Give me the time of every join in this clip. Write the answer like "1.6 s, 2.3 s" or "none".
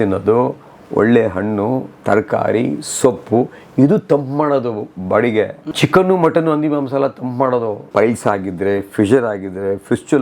5.6 s, 7.9 s

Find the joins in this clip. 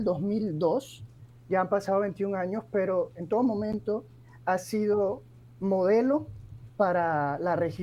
none

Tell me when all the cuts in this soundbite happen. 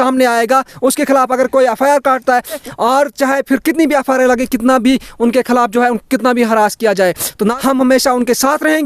2.6 s, 7.6 s

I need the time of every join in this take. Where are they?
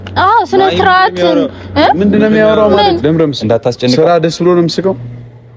3.0 s

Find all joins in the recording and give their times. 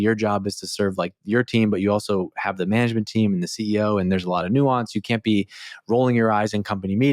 none

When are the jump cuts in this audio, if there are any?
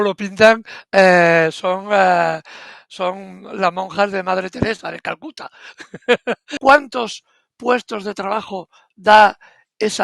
6.5 s

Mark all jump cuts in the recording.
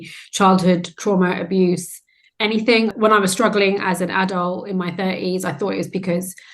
2.9 s

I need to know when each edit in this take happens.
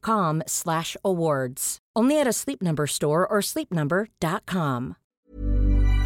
5.0 s

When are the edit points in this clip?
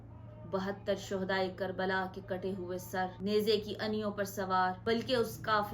4.8 s

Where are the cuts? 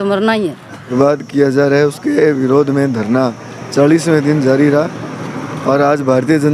0.9 s

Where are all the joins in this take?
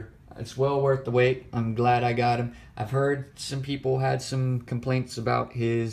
2.6 s

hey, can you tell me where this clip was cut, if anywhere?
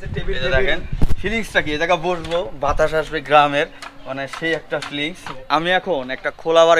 5.3 s

